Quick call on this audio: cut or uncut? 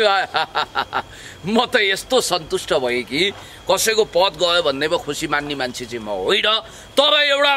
uncut